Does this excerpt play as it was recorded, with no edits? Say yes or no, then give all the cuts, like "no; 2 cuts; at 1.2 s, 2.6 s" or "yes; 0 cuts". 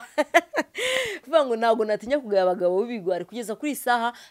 no; 1 cut; at 1.2 s